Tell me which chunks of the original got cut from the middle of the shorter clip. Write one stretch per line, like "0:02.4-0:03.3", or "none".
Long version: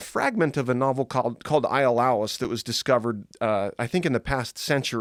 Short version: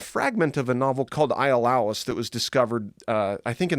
0:01.1-0:01.4